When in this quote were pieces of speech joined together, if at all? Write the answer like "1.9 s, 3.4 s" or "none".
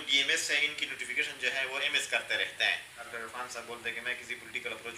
3.1 s

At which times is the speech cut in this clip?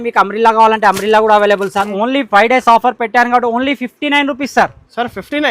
1.9 s

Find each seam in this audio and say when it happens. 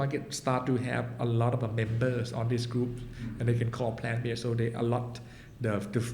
none

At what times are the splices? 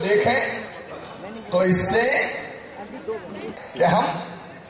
3.5 s

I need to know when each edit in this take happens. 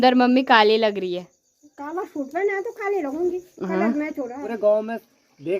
4.4 s

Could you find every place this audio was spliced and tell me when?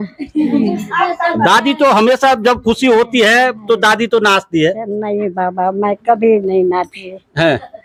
none

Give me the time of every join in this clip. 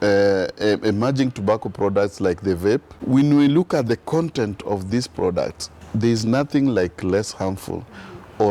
2.9 s

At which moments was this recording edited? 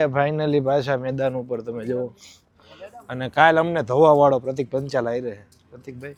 none

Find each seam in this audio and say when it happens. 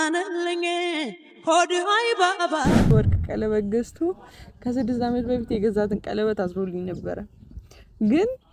2.9 s

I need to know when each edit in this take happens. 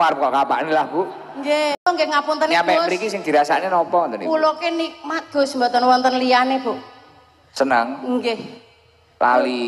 1.8 s

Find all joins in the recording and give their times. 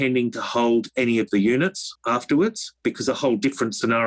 1.9 s, 2.7 s

